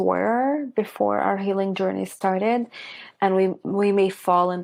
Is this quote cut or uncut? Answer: uncut